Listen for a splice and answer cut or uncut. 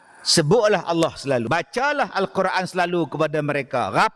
cut